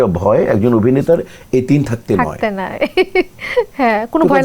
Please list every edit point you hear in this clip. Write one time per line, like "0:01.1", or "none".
none